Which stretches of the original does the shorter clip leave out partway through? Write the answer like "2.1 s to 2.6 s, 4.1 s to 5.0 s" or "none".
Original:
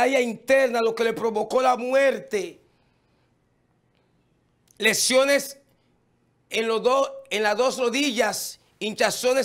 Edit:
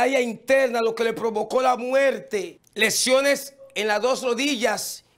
2.6 s to 4.6 s, 5.7 s to 7.2 s